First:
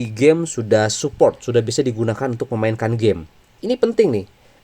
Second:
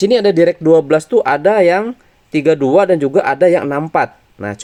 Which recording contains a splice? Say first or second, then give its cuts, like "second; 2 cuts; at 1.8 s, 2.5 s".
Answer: first; 1 cut; at 3.5 s